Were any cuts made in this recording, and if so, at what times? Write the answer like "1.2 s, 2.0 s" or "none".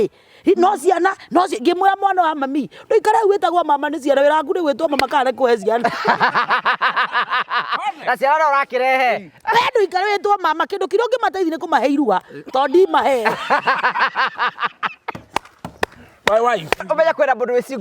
16.9 s

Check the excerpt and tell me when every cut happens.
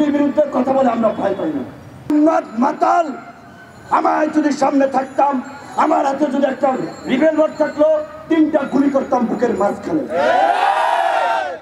2.1 s

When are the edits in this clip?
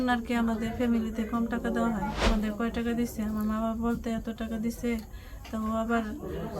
2.2 s

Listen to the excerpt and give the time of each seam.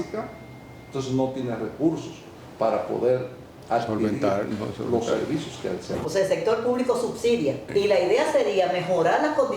5.9 s, 7.6 s

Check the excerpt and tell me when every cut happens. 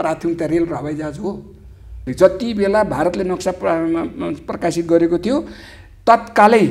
2.1 s

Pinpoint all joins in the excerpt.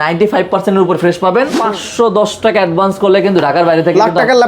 1.6 s

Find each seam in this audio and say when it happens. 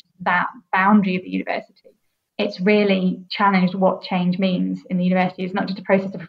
2.3 s, 3.2 s

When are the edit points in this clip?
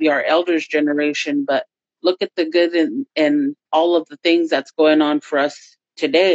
none

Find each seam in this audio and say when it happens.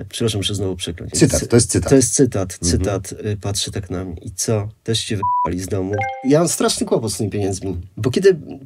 1.1 s, 6.2 s

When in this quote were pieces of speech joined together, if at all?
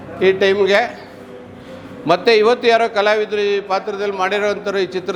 none

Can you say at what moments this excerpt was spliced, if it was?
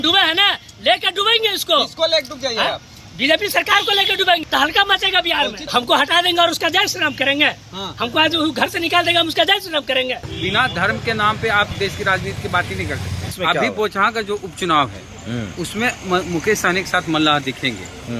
4.4 s, 5.7 s, 10.3 s, 11.7 s, 13.3 s

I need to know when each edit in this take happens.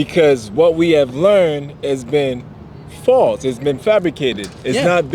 none

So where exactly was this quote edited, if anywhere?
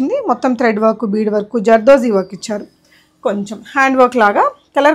none

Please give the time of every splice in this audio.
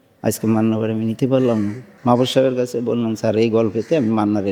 1.9 s

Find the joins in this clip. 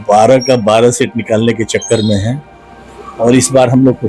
none

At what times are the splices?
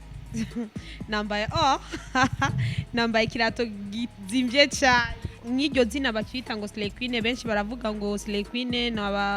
5.3 s

